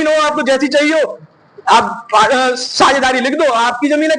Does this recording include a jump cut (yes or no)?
no